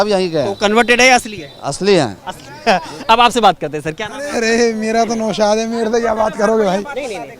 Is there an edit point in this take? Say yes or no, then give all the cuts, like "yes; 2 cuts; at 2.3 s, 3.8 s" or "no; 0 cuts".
no; 0 cuts